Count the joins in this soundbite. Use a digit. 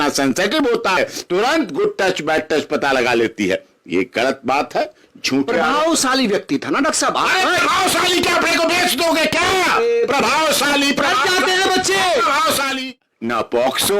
2